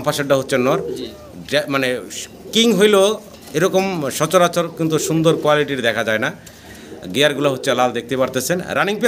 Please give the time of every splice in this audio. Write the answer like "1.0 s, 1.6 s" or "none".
none